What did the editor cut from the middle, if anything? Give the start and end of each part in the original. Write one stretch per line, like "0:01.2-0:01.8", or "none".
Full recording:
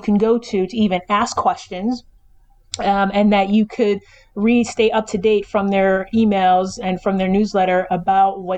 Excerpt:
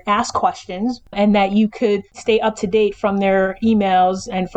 0:02.2-0:03.1
0:04.2-0:04.7